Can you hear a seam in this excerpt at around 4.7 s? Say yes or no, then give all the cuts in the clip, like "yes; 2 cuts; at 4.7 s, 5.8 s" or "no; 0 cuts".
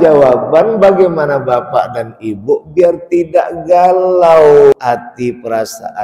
yes; 1 cut; at 4.7 s